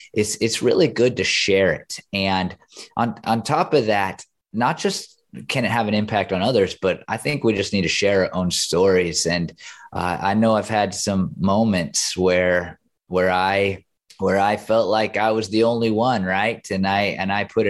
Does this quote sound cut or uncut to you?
uncut